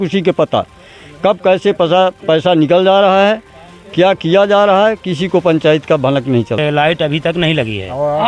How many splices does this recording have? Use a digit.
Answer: 1